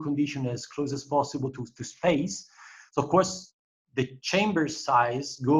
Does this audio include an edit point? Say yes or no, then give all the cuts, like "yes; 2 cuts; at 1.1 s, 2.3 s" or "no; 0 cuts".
no; 0 cuts